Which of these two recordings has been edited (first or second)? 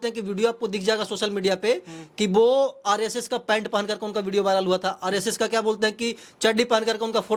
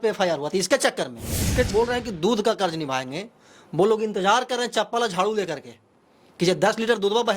second